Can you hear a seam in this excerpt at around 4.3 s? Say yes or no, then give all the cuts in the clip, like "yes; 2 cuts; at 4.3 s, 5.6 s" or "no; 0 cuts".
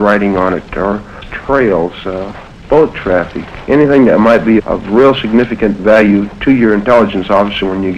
yes; 1 cut; at 4.3 s